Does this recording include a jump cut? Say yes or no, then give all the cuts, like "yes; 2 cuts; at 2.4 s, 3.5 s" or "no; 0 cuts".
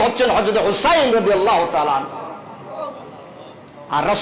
no; 0 cuts